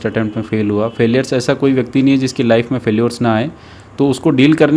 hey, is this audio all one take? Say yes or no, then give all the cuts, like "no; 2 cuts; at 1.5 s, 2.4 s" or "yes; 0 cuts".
yes; 0 cuts